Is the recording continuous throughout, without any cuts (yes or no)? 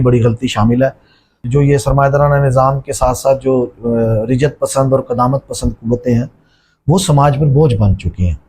no